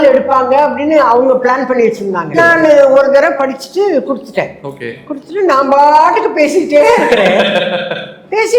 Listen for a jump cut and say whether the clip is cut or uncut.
cut